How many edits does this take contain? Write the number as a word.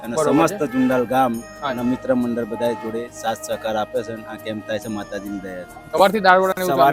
one